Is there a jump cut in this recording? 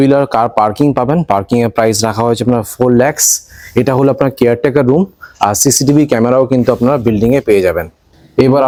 no; 0 cuts

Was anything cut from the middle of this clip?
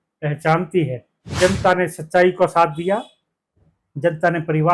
yes; 1 cut; at 1.4 s

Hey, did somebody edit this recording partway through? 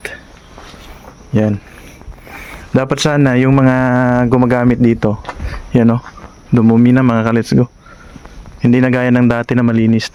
no; 0 cuts

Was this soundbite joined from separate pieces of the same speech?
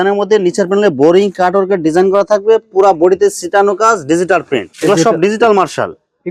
no; 0 cuts

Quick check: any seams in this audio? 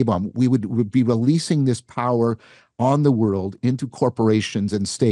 yes; 1 cut; at 3.6 s

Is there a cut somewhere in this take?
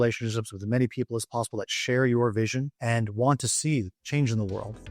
yes; 2 cuts; at 2.7 s, 4.0 s

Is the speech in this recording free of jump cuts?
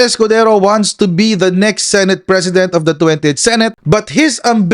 no; 1 cut; at 3.8 s

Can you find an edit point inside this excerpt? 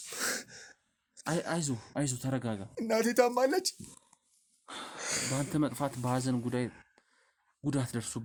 no; 0 cuts

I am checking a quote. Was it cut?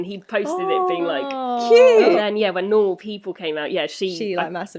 yes; 1 cut; at 2.2 s

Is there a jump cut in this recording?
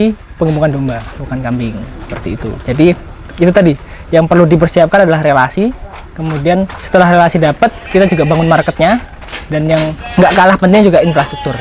yes; 2 cuts; at 6.8 s, 10.0 s

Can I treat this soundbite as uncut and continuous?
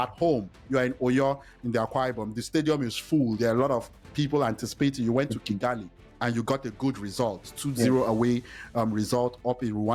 yes; 0 cuts

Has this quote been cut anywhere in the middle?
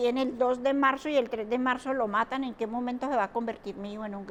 no; 0 cuts

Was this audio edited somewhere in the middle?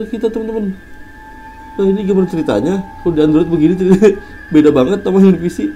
no; 0 cuts

